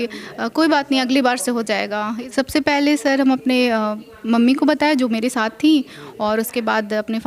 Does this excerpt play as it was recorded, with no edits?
no; 1 cut; at 2.1 s

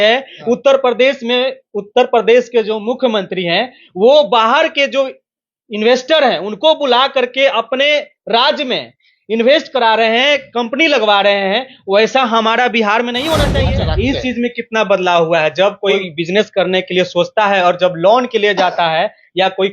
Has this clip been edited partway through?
yes; 2 cuts; at 13.7 s, 16.0 s

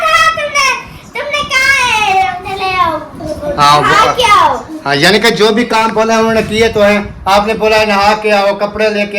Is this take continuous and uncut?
no; 1 cut; at 2.4 s

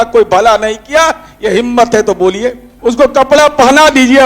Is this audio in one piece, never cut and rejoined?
no; 1 cut; at 2.7 s

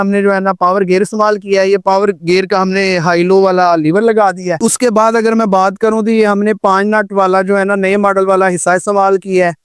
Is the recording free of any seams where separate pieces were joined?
yes; 0 cuts

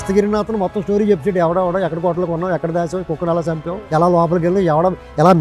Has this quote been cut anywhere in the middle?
no; 0 cuts

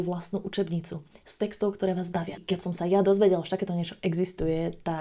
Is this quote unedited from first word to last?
no; 1 cut; at 2.4 s

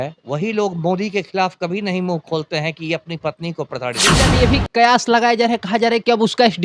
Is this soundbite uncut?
no; 1 cut; at 4.3 s

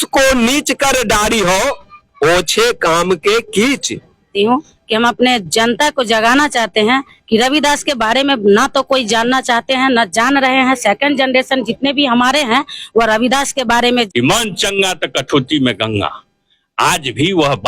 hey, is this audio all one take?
no; 2 cuts; at 4.3 s, 13.9 s

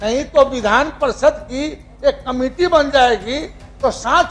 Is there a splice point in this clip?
no; 0 cuts

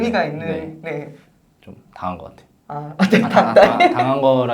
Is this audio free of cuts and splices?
no; 1 cut; at 1.2 s

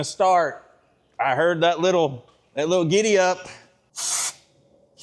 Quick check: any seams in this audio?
no; 0 cuts

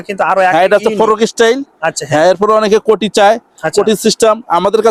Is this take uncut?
yes; 0 cuts

